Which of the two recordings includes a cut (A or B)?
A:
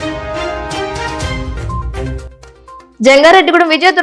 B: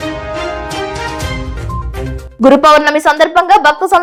A